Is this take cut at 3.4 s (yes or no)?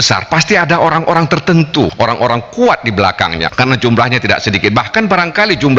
yes